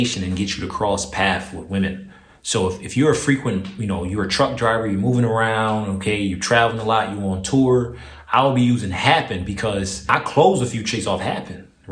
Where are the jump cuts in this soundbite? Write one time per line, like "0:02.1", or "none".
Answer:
0:10.1